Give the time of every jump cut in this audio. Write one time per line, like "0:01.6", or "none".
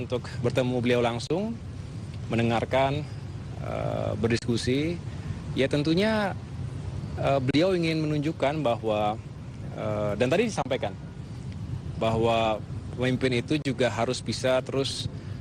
none